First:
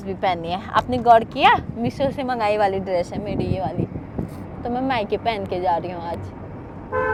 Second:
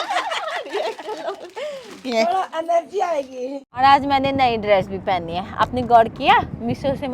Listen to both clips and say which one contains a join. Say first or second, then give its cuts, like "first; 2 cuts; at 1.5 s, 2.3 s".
second; 1 cut; at 3.6 s